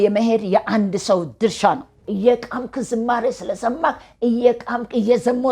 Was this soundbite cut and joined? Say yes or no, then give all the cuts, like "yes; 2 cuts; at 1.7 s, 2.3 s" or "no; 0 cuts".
yes; 1 cut; at 2.0 s